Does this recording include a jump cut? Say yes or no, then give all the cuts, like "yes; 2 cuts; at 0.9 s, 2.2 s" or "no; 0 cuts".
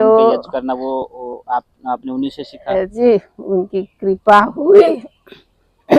yes; 1 cut; at 2.9 s